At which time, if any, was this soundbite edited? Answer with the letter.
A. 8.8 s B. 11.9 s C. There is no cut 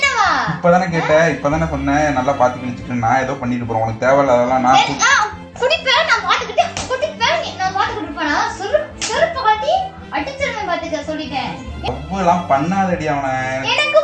B